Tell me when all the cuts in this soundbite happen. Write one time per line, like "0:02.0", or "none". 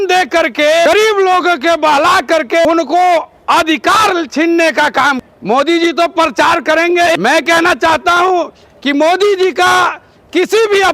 0:00.9
0:02.6
0:05.2
0:07.2